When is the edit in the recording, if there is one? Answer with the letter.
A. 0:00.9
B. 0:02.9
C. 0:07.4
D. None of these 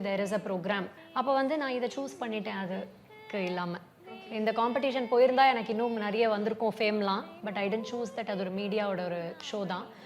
A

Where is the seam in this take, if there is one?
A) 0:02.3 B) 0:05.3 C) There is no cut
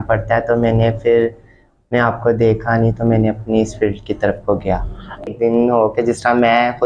B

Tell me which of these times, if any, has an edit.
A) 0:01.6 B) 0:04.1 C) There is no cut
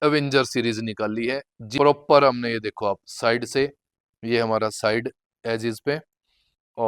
A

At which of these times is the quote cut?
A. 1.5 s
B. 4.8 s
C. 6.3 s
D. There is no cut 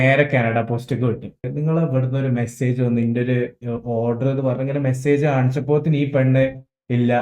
A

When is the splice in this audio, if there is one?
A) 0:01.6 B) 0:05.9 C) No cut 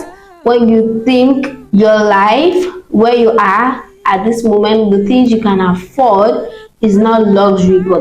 A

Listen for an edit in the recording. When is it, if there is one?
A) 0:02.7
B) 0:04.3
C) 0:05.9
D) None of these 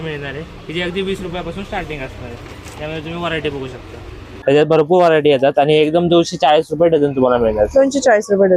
B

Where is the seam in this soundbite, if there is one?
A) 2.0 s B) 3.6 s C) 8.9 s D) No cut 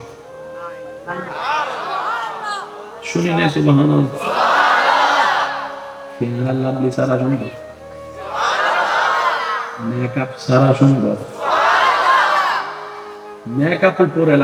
D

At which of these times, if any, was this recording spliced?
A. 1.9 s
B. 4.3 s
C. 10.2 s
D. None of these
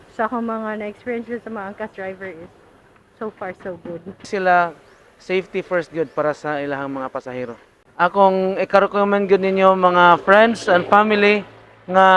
B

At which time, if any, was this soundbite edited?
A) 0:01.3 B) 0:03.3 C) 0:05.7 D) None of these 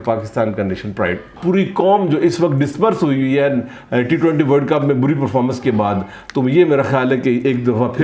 A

